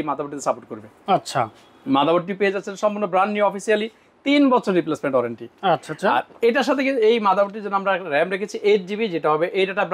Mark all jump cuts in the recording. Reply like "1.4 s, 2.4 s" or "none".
none